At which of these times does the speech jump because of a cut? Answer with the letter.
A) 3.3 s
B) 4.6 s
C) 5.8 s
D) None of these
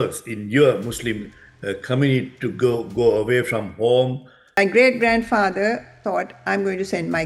B